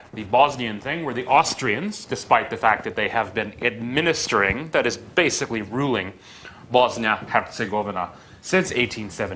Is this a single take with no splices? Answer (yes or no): no